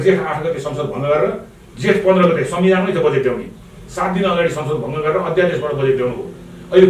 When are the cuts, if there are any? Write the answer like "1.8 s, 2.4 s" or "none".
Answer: none